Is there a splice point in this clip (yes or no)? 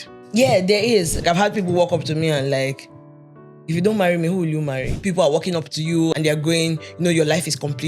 yes